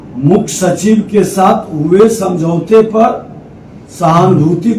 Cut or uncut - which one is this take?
uncut